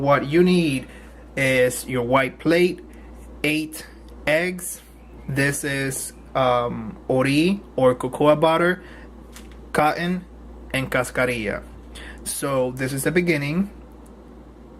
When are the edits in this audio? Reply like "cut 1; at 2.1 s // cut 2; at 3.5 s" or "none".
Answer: none